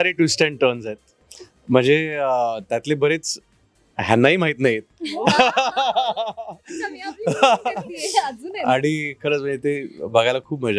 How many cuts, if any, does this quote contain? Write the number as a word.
zero